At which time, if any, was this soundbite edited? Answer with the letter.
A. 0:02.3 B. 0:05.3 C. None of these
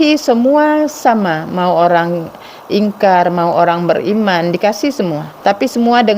B